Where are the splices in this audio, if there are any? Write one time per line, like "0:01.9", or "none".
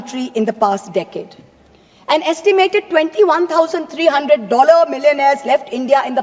none

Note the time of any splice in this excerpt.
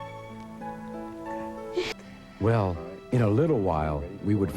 0:01.9

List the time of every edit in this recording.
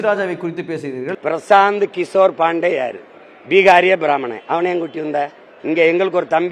0:01.1

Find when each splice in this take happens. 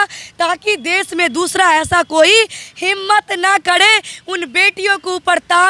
none

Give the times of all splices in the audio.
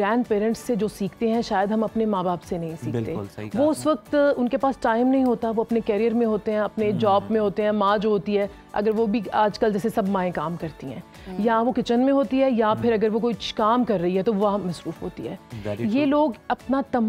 none

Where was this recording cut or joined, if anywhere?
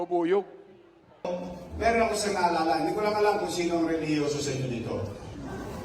0:01.3

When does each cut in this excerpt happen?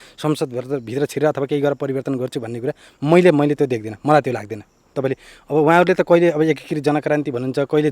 0:04.9

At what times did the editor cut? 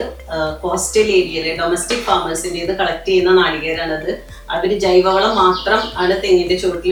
none

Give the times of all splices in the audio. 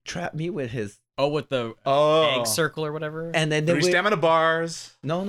0:01.0

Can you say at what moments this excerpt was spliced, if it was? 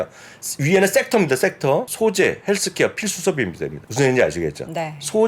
0:01.9
0:03.8

